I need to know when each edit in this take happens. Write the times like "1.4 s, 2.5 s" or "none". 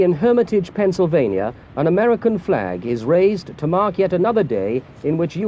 none